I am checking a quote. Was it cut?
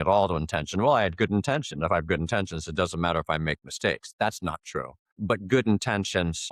no; 0 cuts

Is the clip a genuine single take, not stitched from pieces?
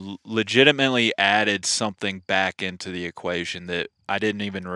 yes; 0 cuts

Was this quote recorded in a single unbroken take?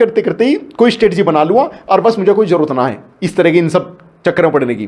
yes; 0 cuts

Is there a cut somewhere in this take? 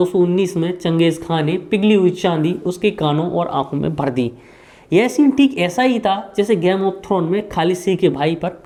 no; 0 cuts

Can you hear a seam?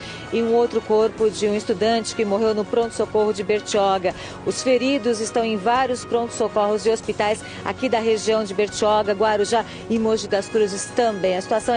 no; 0 cuts

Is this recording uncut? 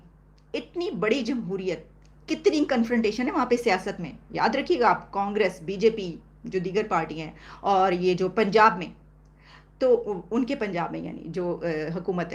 yes; 0 cuts

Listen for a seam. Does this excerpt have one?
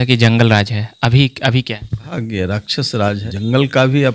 yes; 2 cuts; at 2.1 s, 3.2 s

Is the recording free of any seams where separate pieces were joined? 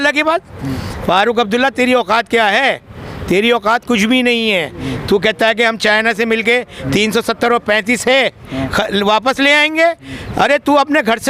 yes; 0 cuts

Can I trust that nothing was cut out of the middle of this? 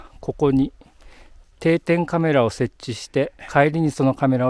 no; 1 cut; at 3.4 s

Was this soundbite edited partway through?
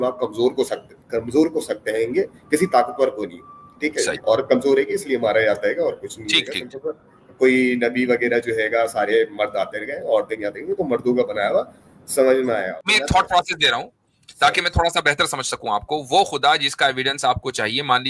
yes; 1 cut; at 12.8 s

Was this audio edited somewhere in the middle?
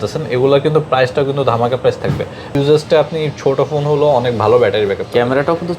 yes; 1 cut; at 2.5 s

